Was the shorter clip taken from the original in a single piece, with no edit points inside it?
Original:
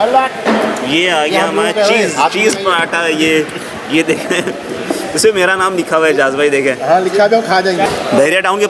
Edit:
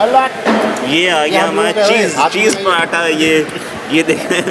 yes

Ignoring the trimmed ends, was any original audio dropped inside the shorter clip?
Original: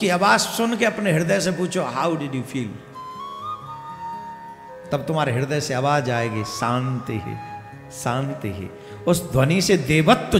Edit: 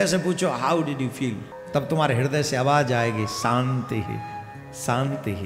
yes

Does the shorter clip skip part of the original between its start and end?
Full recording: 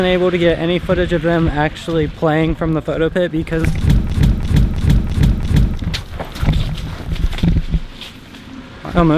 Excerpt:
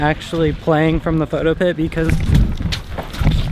yes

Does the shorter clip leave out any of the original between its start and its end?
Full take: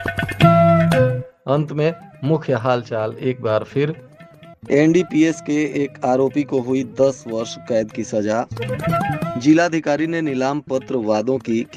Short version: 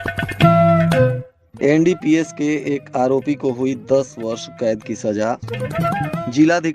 yes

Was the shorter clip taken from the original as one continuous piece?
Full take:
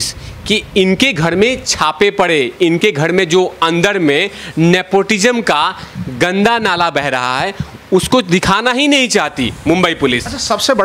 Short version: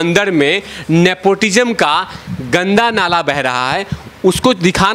yes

